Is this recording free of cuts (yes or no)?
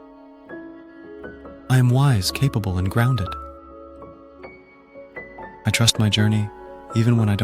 no